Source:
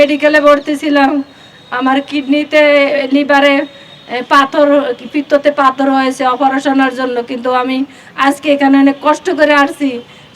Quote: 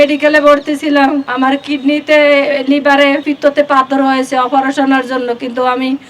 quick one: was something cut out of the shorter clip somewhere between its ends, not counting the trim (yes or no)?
yes